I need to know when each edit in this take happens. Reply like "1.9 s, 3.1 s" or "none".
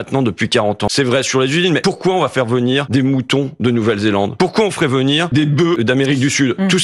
0.9 s, 1.8 s, 2.9 s, 4.3 s, 5.7 s